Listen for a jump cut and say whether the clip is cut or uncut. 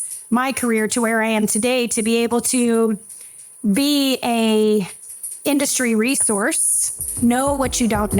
cut